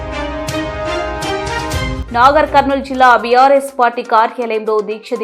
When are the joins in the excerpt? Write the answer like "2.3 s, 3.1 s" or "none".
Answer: 1.8 s